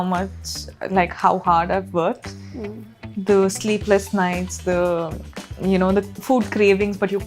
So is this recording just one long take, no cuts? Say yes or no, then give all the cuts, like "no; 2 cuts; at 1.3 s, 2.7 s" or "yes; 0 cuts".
yes; 0 cuts